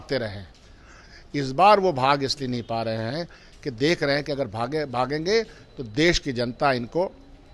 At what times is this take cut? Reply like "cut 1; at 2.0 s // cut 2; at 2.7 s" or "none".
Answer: none